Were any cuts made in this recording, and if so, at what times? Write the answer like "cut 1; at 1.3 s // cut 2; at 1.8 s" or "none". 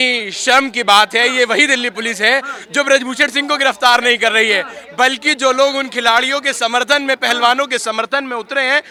none